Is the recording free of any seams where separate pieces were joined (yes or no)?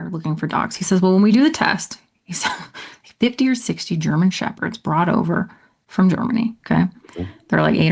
yes